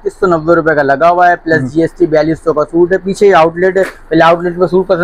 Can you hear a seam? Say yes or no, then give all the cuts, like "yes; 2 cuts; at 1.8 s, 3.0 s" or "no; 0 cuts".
no; 0 cuts